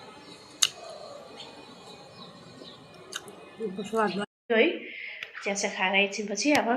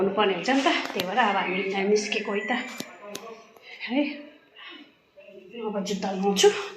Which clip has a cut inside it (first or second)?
first